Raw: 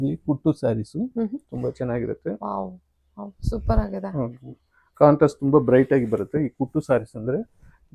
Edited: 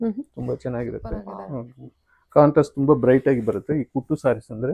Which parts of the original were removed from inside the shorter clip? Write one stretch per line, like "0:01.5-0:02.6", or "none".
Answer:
0:02.5-0:04.0